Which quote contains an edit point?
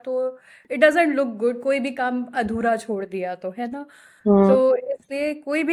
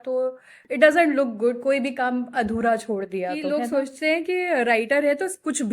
second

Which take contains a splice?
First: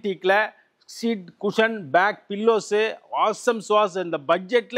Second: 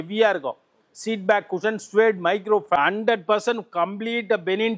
second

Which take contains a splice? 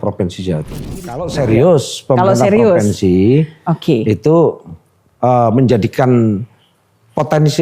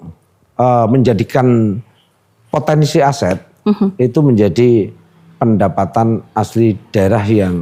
first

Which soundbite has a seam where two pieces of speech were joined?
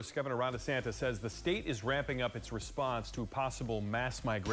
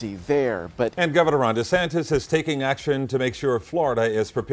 second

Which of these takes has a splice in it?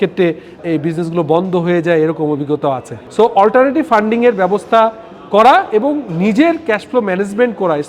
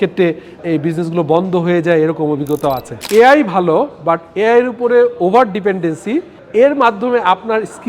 second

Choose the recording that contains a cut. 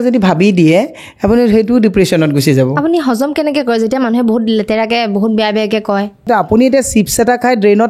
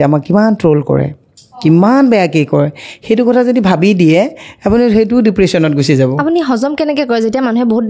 first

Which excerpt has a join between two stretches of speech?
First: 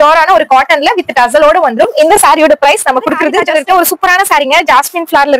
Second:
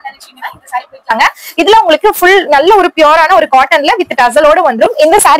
first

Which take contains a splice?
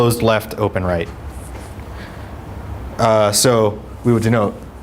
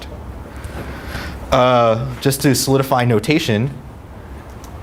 first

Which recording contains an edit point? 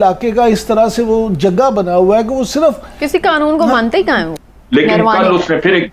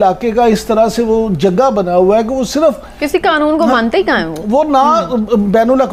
first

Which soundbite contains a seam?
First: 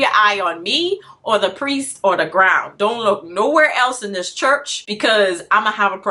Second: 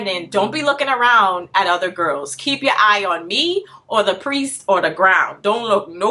first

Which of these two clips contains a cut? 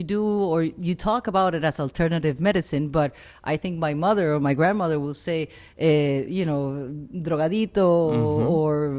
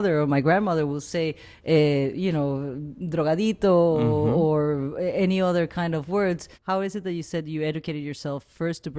second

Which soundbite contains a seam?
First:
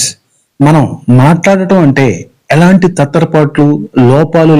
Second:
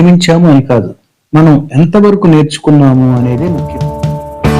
second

